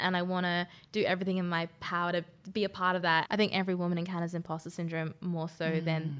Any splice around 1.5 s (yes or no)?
no